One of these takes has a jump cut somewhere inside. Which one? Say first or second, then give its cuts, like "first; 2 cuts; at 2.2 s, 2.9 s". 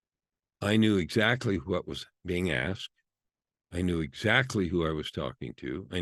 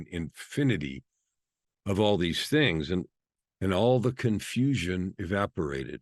second; 1 cut; at 3.1 s